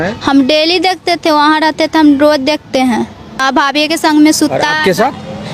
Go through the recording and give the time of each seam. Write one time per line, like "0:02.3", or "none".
0:03.3